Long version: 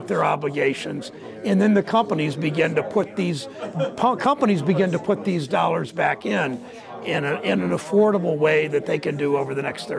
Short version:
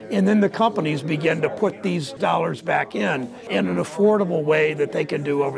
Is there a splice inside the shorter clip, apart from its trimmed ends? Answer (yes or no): yes